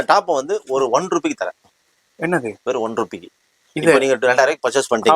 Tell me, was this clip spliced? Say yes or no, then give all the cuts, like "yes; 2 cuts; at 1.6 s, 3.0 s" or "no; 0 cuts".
no; 0 cuts